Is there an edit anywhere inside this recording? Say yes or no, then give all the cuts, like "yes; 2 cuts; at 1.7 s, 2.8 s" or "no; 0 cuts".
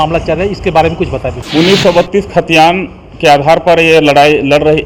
yes; 1 cut; at 1.4 s